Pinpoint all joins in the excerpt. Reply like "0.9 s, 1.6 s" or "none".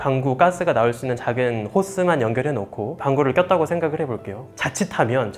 4.5 s

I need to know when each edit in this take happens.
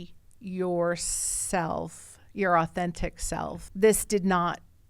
3.6 s

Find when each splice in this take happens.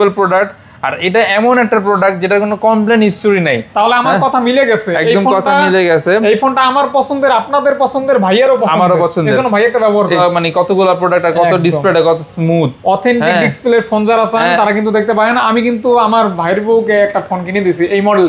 3.7 s, 10.2 s

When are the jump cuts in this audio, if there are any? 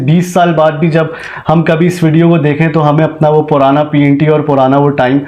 none

